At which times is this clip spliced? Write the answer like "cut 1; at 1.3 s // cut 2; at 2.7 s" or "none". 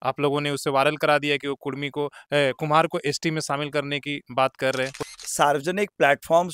cut 1; at 5.0 s